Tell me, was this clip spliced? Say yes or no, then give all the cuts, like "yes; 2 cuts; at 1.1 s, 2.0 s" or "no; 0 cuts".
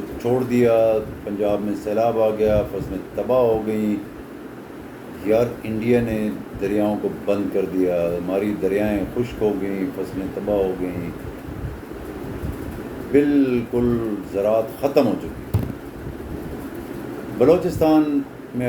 no; 0 cuts